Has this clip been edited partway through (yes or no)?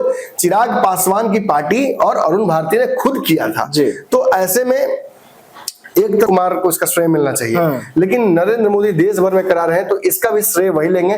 yes